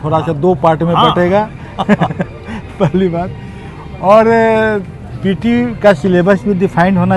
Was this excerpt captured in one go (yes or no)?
yes